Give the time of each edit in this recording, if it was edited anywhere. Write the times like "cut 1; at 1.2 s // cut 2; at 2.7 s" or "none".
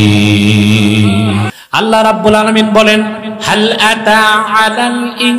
cut 1; at 1.5 s